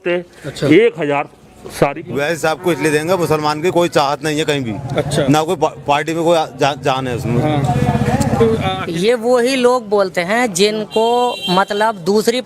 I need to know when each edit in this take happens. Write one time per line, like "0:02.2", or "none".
0:02.0
0:08.9